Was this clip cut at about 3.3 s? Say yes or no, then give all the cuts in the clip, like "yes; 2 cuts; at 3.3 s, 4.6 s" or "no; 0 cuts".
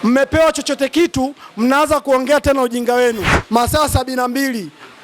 yes; 1 cut; at 3.3 s